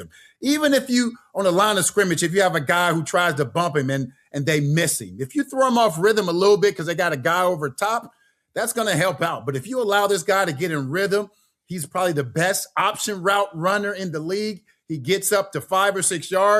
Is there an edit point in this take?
no; 0 cuts

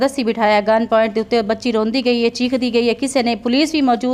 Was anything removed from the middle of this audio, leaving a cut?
no; 0 cuts

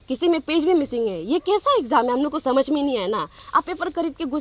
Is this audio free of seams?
no; 1 cut; at 3.3 s

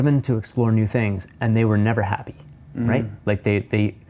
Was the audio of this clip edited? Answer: no; 0 cuts

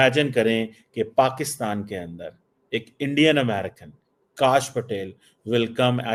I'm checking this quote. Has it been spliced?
no; 0 cuts

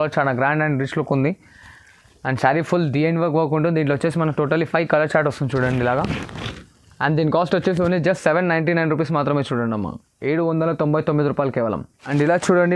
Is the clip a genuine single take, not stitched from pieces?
yes; 0 cuts

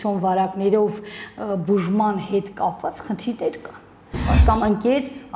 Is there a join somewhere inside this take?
yes; 1 cut; at 4.3 s

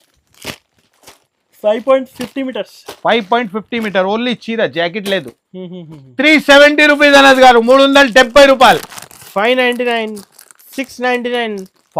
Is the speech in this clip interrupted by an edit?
no; 0 cuts

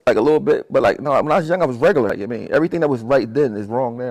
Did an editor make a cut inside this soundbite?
yes; 1 cut; at 2.2 s

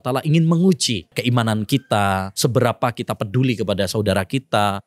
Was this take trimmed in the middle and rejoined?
yes; 2 cuts; at 1.2 s, 2.3 s

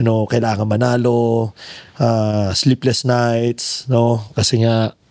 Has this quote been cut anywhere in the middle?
no; 0 cuts

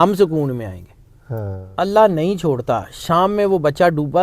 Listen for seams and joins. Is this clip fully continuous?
no; 1 cut; at 1.6 s

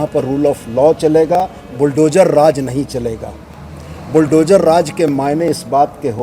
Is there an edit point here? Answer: no; 0 cuts

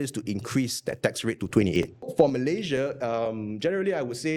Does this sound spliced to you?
yes; 1 cut; at 2.1 s

